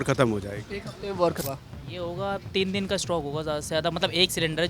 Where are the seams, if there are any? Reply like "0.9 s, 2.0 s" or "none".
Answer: 1.4 s